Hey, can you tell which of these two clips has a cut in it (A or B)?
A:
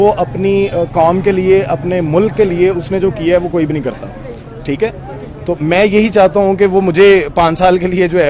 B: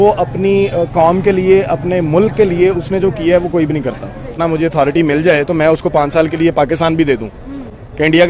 B